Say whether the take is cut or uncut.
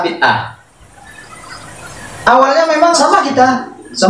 cut